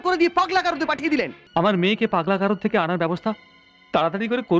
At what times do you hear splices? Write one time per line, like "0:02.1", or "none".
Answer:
0:01.4